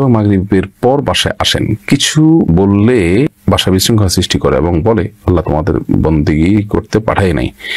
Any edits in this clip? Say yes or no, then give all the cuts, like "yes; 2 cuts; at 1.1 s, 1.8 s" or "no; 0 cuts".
no; 0 cuts